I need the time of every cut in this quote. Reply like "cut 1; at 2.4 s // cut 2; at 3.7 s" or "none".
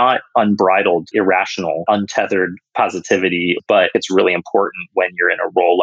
cut 1; at 1.3 s // cut 2; at 3.6 s